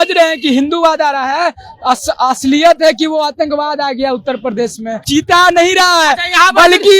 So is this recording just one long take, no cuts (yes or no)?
no